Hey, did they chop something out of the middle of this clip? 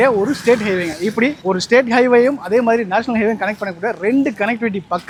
no; 0 cuts

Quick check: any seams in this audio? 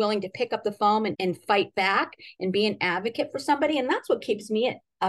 no; 0 cuts

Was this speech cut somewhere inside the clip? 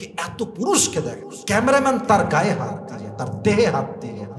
no; 0 cuts

